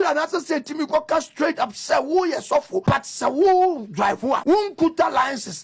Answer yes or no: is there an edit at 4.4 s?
yes